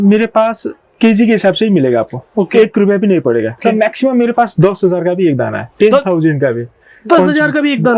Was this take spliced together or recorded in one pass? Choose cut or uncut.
cut